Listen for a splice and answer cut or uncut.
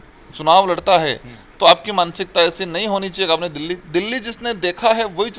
uncut